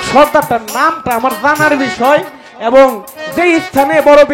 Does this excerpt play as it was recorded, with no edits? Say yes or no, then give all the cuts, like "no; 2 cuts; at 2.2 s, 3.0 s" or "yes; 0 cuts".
yes; 0 cuts